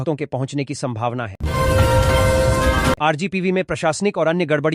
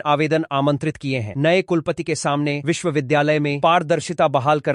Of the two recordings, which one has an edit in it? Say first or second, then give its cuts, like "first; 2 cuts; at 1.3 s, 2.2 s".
first; 2 cuts; at 1.4 s, 3.0 s